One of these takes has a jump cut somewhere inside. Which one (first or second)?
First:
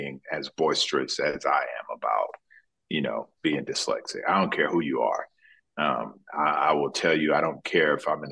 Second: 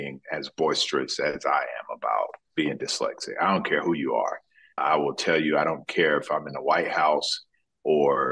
second